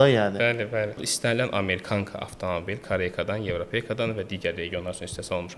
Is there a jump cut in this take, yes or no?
yes